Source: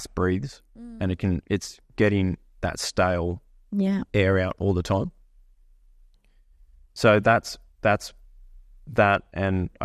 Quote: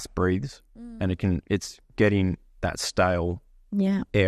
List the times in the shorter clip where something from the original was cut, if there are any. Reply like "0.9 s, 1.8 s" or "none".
none